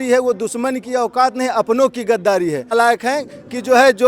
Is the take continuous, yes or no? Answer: no